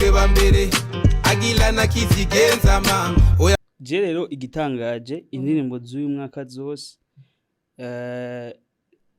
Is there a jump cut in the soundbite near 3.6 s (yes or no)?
yes